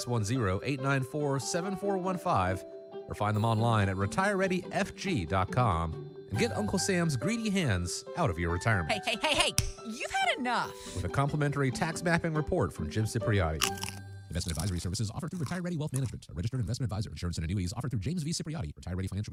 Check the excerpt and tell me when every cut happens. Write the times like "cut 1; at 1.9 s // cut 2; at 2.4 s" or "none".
none